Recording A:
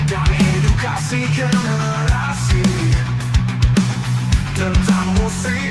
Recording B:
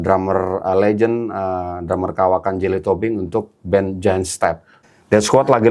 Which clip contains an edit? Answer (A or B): B